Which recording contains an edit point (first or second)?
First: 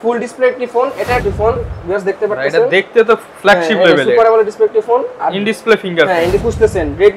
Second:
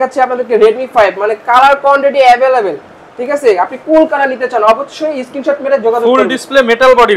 first